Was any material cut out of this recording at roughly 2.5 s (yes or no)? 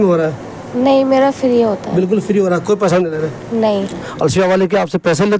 no